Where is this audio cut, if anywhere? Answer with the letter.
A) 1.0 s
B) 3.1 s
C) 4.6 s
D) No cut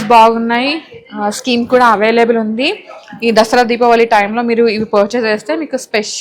D